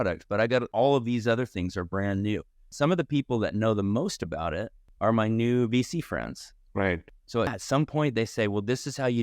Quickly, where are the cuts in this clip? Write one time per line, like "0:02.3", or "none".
0:02.7
0:07.1